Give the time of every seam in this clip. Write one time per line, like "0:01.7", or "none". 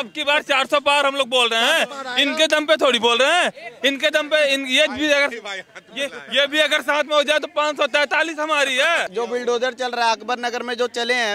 0:09.1